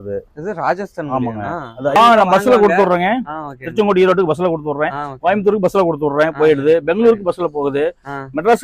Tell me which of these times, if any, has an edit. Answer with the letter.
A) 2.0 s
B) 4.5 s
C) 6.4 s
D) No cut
A